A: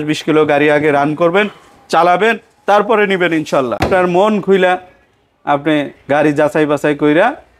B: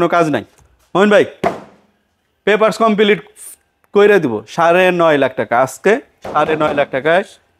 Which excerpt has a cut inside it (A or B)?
A